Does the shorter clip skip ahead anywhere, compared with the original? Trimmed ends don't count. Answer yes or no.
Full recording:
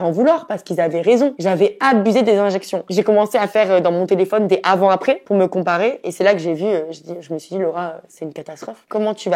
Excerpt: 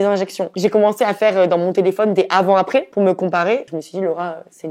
yes